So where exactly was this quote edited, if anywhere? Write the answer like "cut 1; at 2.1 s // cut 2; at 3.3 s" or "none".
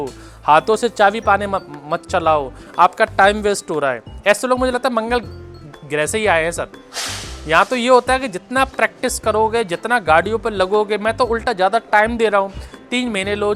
none